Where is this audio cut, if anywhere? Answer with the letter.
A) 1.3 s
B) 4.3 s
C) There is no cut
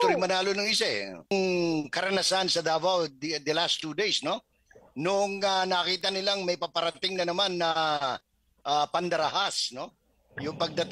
A